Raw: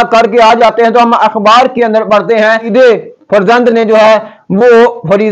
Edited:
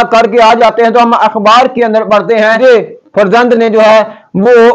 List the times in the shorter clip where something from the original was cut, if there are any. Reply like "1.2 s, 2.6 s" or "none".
2.6 s

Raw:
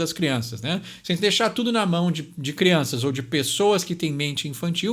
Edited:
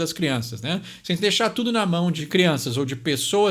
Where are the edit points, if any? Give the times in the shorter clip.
2.2 s

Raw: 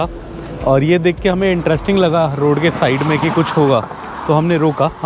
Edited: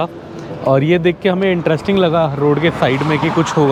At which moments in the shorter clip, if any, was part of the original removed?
none

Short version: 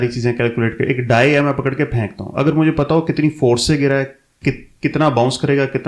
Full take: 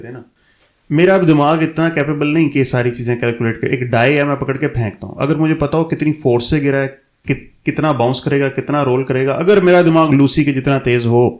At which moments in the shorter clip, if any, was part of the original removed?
none

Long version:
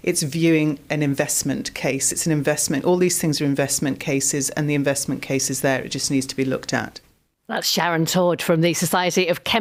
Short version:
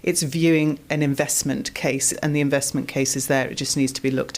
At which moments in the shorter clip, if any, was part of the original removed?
2.1 s

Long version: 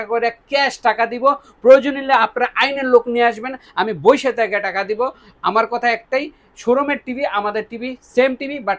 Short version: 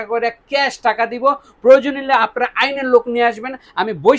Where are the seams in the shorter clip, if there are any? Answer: none

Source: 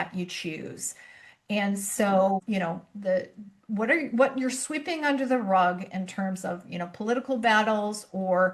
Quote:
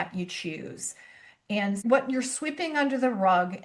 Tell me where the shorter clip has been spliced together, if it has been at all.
1.8 s

